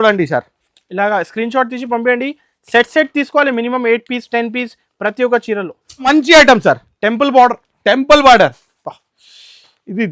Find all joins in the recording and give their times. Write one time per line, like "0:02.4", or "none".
0:06.1